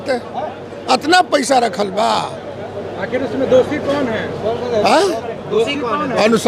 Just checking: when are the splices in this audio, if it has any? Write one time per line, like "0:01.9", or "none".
none